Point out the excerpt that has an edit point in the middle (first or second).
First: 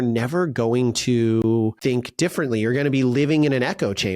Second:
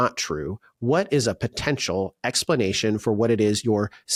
first